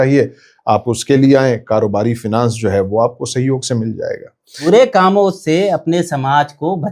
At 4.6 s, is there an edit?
yes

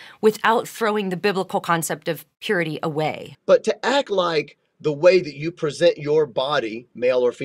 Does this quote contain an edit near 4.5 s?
no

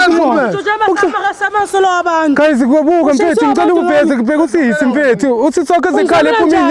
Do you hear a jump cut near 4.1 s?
no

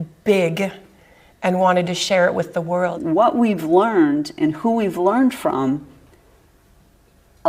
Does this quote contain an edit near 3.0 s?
yes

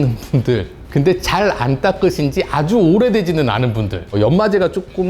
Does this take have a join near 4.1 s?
yes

